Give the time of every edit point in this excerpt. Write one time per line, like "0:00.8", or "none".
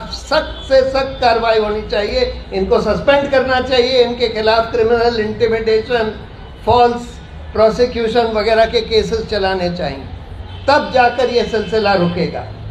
none

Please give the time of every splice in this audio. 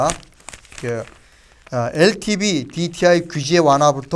0:03.1

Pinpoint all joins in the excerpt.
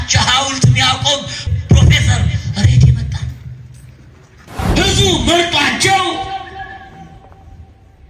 0:01.4
0:04.6

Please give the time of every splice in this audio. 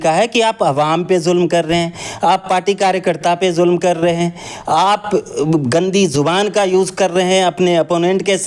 none

